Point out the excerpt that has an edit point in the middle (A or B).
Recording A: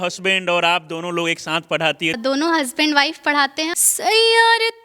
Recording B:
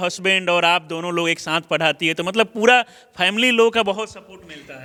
A